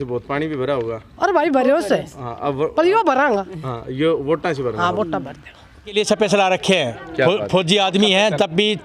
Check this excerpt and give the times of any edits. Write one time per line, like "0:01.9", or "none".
0:05.9